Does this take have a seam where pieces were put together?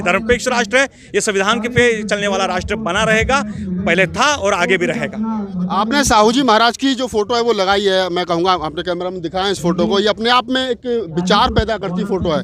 no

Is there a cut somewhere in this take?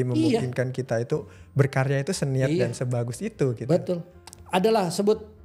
no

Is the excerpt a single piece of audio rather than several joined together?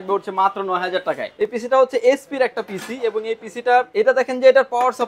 no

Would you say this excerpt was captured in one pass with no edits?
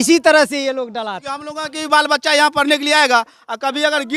no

